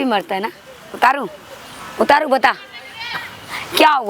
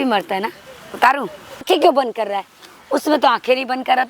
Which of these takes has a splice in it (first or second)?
second